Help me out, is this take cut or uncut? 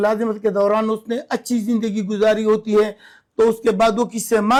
uncut